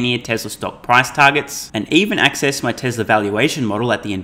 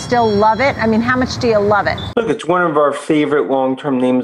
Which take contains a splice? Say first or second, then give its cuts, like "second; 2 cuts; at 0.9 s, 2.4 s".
second; 1 cut; at 2.0 s